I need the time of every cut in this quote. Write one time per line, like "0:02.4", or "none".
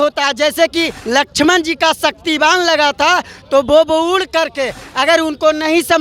0:01.0